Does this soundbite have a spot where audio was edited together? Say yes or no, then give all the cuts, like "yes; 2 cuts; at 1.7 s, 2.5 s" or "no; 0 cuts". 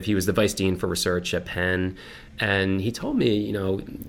no; 0 cuts